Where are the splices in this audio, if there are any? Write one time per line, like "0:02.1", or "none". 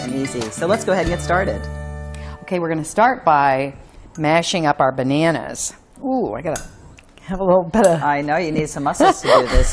0:01.7